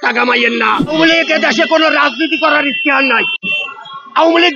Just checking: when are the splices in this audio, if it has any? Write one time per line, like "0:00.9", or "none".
0:00.9